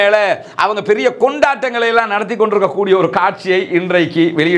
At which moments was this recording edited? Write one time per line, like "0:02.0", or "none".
none